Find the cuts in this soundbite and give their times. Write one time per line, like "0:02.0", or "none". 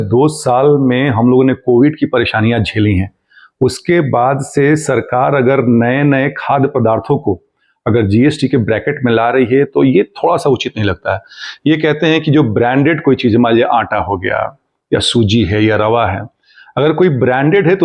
none